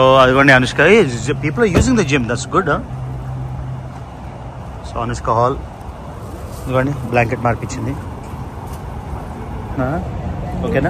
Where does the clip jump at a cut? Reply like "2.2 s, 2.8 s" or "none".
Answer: 9.7 s